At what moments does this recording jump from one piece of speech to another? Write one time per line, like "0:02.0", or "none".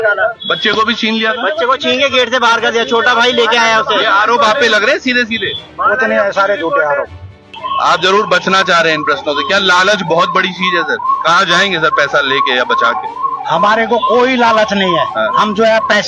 0:07.5